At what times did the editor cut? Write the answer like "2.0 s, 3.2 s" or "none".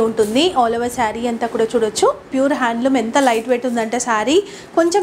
2.3 s